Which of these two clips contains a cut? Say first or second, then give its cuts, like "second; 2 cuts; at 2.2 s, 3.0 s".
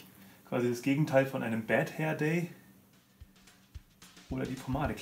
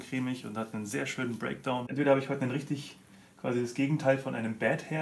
second; 1 cut; at 1.9 s